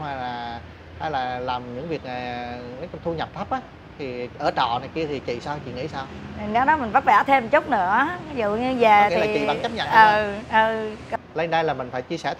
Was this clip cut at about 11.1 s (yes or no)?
yes